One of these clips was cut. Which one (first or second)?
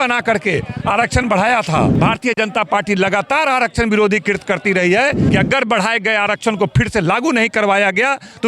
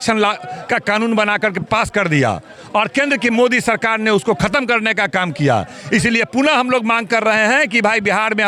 first